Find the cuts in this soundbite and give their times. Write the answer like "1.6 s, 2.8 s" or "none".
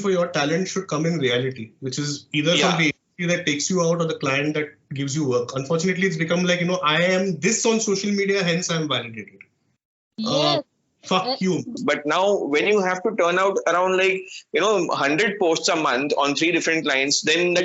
11.8 s